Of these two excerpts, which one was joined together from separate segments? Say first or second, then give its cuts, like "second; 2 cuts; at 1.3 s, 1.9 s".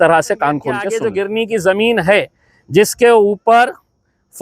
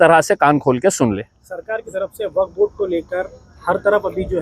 first; 1 cut; at 0.9 s